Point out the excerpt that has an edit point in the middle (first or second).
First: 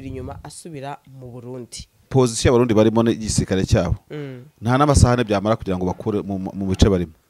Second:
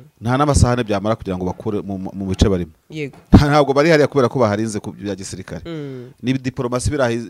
first